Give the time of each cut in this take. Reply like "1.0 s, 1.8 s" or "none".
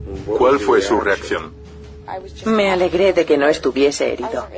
3.3 s